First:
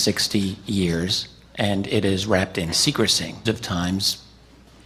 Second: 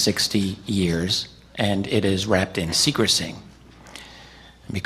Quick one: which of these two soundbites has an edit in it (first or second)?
second